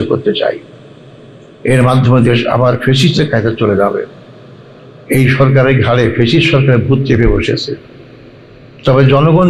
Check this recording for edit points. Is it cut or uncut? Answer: uncut